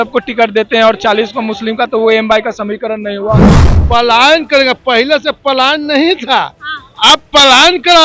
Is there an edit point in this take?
yes; 1 cut; at 3.5 s

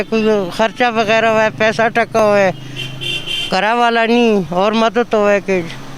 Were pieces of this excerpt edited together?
no; 0 cuts

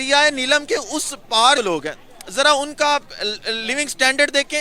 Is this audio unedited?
no; 1 cut; at 1.6 s

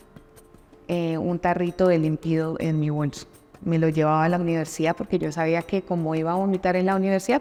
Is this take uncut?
yes; 0 cuts

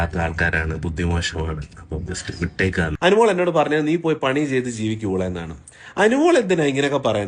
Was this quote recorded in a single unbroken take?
no; 1 cut; at 2.9 s

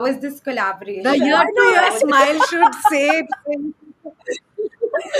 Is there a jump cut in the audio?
no; 0 cuts

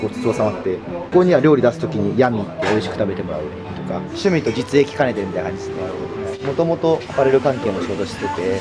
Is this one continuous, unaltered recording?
yes; 0 cuts

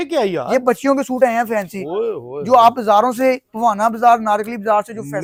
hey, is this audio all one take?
yes; 0 cuts

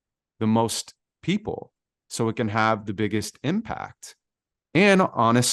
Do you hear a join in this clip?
no; 0 cuts

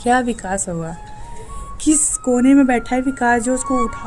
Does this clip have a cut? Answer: no; 0 cuts

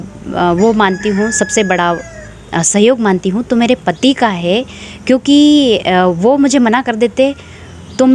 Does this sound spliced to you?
no; 0 cuts

